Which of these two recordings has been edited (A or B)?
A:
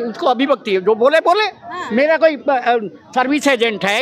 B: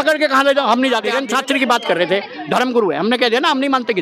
B